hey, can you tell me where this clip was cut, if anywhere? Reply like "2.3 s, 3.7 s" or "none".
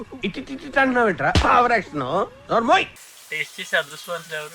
3.0 s